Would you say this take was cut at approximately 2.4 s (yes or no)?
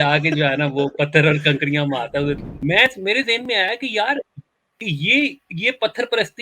yes